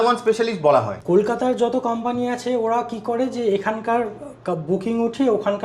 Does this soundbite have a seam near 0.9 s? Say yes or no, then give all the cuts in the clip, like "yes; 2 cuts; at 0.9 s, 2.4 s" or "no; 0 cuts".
yes; 1 cut; at 0.9 s